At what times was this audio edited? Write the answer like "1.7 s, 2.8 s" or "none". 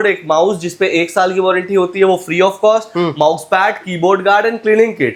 none